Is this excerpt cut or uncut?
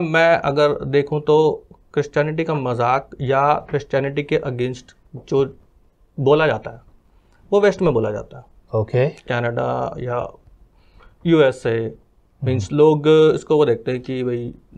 uncut